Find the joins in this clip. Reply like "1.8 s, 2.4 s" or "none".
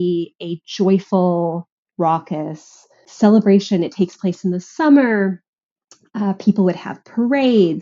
3.0 s